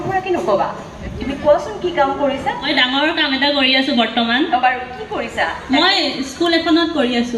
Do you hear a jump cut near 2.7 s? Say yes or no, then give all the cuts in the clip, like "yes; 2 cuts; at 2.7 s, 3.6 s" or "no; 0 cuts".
yes; 1 cut; at 2.7 s